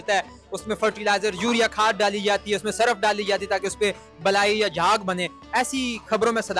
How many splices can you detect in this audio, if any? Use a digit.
0